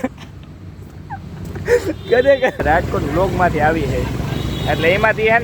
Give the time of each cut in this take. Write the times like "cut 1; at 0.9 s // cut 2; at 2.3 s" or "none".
cut 1; at 2.6 s